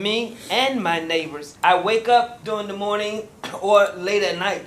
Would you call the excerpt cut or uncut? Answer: cut